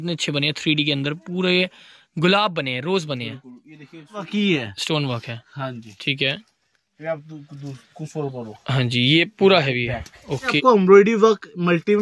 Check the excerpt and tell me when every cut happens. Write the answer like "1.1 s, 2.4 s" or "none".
4.3 s, 10.5 s